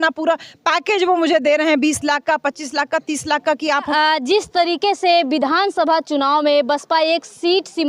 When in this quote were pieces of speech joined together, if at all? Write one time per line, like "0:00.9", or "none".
0:03.9